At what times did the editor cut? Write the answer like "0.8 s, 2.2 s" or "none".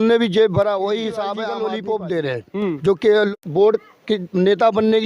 1.4 s, 3.4 s